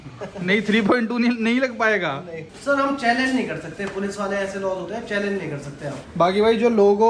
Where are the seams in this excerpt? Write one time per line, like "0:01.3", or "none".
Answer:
0:02.5
0:06.0